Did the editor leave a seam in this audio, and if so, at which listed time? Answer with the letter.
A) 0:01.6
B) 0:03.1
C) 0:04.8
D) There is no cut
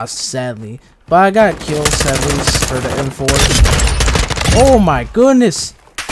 D